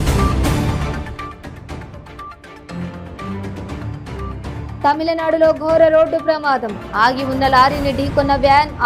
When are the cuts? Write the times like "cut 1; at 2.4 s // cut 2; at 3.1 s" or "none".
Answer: cut 1; at 2.3 s